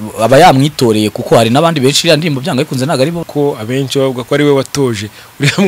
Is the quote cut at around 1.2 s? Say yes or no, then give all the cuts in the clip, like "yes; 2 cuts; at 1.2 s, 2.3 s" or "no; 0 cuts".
no; 1 cut; at 3.2 s